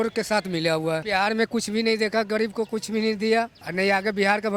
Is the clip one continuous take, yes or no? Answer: no